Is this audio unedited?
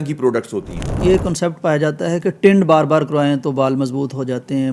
no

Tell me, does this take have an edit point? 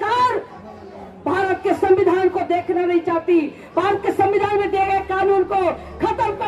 no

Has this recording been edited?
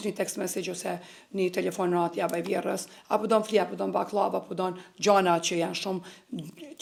no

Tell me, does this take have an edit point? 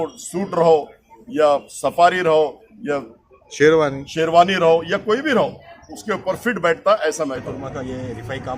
yes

